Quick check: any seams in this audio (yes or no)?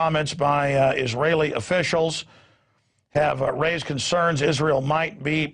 yes